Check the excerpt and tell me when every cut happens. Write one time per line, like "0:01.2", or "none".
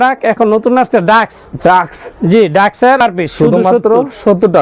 0:03.0